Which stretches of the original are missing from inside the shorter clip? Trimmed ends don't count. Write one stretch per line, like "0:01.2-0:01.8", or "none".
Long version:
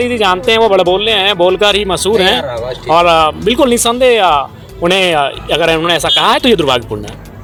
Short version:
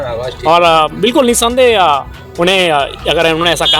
none